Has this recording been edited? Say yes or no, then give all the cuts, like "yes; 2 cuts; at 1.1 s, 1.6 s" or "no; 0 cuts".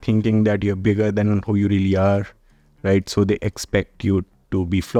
no; 0 cuts